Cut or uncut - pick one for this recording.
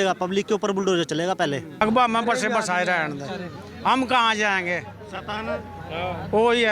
cut